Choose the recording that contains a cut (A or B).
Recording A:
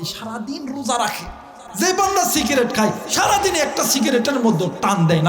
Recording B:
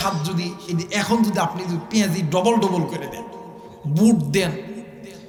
A